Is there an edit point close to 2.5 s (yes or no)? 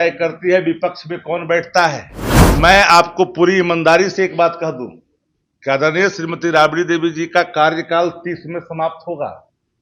yes